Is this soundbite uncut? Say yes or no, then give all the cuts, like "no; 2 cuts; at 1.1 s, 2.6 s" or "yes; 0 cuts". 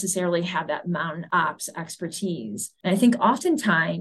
no; 1 cut; at 2.7 s